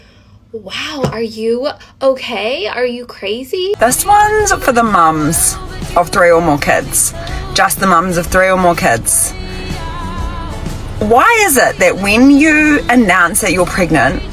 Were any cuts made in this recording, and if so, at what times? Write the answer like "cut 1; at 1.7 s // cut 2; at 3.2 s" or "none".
cut 1; at 3.8 s

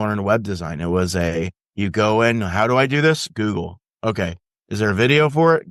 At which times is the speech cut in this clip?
cut 1; at 1.6 s

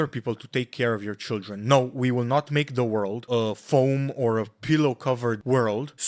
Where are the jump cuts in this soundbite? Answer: none

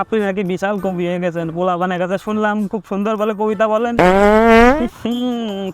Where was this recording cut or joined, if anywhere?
cut 1; at 3.9 s

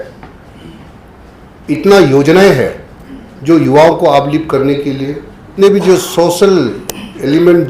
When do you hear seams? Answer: cut 1; at 5.5 s

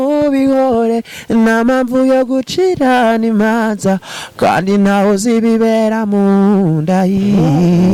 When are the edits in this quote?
none

